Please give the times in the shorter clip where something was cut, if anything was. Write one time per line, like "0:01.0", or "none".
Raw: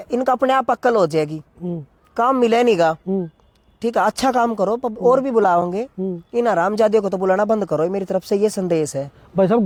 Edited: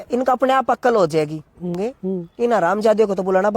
0:01.9